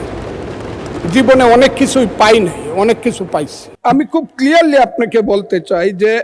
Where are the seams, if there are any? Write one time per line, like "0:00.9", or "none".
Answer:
0:03.6

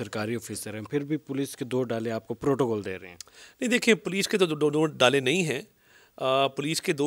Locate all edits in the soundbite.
none

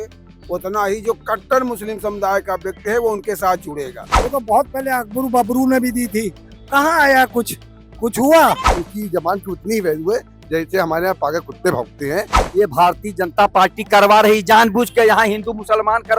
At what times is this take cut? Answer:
0:04.1
0:08.8
0:12.4

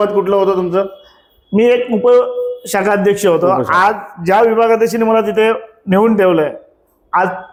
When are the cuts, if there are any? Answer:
none

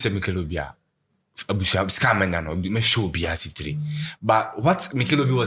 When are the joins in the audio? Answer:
none

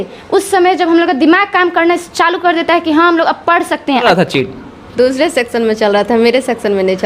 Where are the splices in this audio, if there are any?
0:04.0

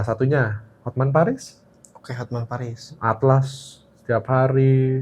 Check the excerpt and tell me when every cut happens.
none

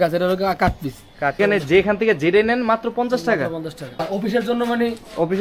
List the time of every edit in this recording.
0:01.4
0:04.0

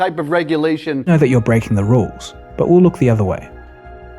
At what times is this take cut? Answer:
0:01.1

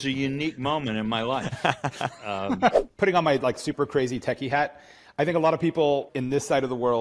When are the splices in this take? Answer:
0:02.8
0:06.1

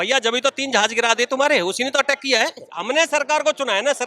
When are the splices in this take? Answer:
0:02.7

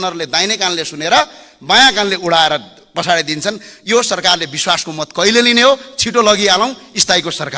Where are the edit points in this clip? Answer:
none

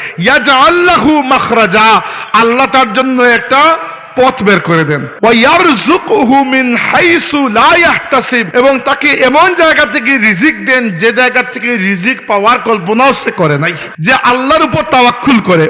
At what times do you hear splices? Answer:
0:05.1
0:08.5
0:13.9

